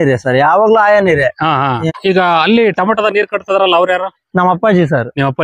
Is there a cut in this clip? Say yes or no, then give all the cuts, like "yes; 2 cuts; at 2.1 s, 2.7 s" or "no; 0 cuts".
yes; 1 cut; at 1.8 s